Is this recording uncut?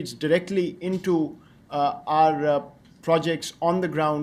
no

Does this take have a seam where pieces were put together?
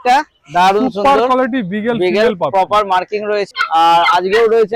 yes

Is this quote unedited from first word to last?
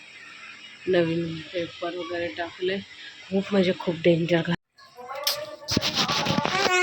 no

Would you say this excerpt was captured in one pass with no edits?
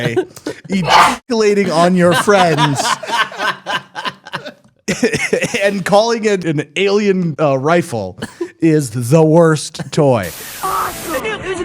no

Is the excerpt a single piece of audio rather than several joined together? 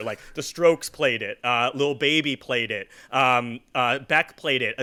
yes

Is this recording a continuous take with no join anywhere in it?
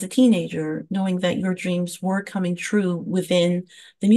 yes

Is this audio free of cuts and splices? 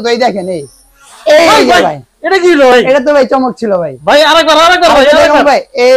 yes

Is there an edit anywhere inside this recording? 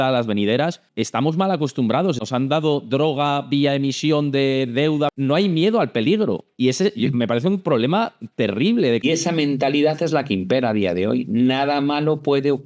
yes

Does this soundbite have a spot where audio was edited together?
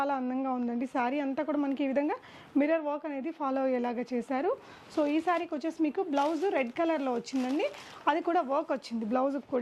no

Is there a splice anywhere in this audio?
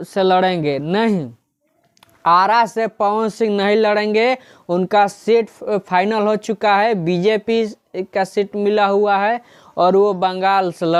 no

